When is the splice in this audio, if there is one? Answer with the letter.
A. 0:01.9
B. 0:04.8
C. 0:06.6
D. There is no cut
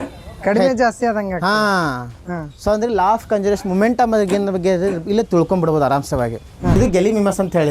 C